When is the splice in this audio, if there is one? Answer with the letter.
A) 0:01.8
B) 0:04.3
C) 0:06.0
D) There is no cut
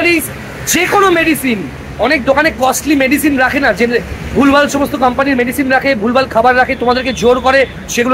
D